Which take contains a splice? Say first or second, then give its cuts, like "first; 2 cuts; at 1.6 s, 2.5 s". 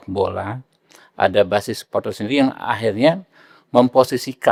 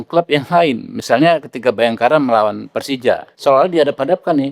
second; 1 cut; at 3.3 s